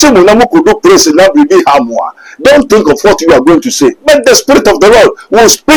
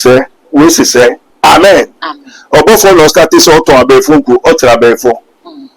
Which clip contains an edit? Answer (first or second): second